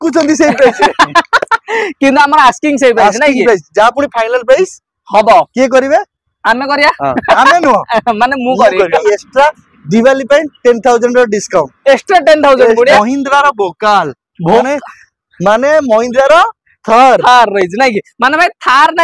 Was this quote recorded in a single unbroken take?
no; 2 cuts; at 9.0 s, 13.0 s

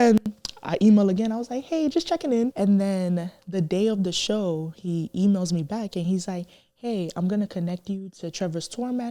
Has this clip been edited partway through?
yes; 1 cut; at 2.5 s

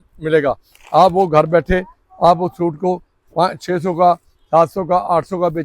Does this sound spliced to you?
no; 0 cuts

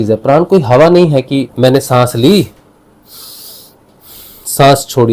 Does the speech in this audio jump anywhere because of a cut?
yes; 1 cut; at 1.5 s

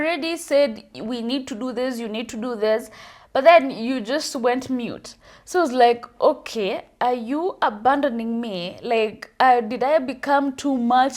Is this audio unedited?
yes; 0 cuts

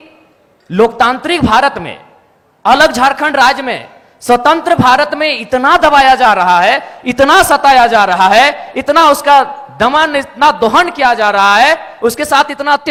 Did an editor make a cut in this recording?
no; 0 cuts

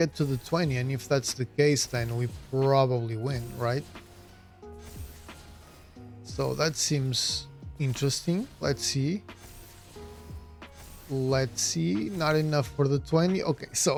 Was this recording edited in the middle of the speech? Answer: no; 0 cuts

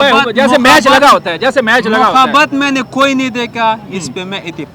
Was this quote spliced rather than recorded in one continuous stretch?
no; 0 cuts

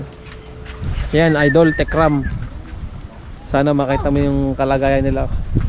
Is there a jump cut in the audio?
yes; 1 cut; at 0.9 s

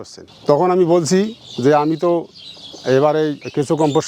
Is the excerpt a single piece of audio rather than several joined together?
yes; 0 cuts

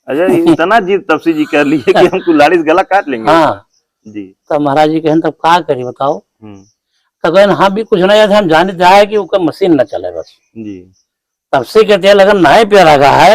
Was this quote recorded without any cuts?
yes; 0 cuts

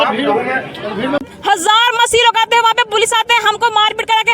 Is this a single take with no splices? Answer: no; 1 cut; at 1.2 s

